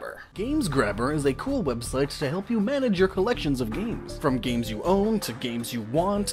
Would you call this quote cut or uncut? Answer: uncut